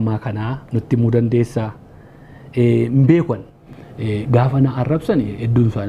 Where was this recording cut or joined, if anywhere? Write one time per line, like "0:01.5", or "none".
0:03.5